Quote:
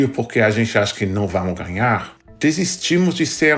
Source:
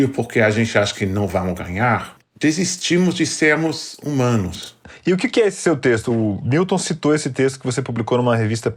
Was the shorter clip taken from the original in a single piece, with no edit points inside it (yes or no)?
yes